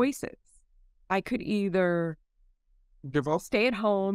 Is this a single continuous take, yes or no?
yes